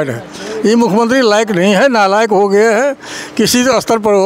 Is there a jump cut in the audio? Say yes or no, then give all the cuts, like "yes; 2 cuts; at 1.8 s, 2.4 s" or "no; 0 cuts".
no; 0 cuts